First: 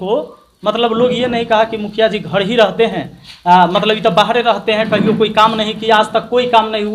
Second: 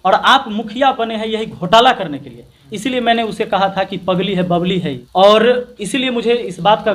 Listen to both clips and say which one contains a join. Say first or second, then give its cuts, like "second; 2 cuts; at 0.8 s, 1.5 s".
second; 1 cut; at 5.0 s